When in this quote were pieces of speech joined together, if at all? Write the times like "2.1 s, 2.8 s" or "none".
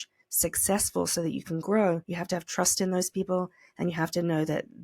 2.1 s